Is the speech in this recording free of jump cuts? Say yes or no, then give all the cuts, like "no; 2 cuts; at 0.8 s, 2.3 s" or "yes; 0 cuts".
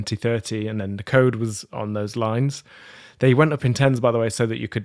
yes; 0 cuts